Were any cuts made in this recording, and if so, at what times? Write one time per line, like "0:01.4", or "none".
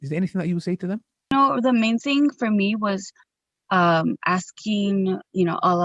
0:01.3